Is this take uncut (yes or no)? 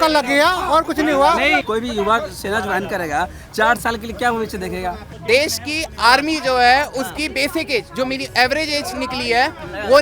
no